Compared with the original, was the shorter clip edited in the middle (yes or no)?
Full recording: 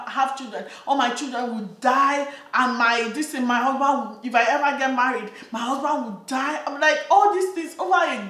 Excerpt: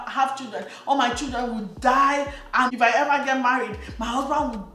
yes